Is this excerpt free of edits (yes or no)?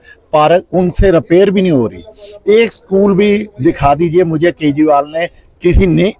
yes